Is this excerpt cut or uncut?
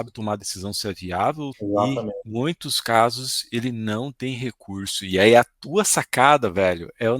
cut